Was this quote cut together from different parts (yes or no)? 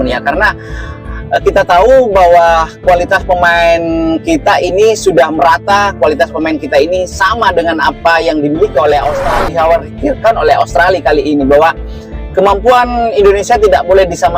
yes